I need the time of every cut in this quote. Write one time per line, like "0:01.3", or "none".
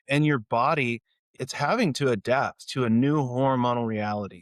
0:01.3